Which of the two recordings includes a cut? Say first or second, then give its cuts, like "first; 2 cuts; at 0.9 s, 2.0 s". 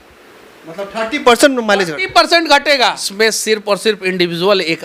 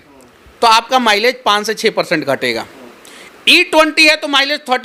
first; 1 cut; at 3.0 s